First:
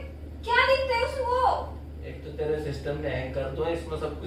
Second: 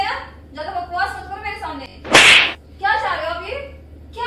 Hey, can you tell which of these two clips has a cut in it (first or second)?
second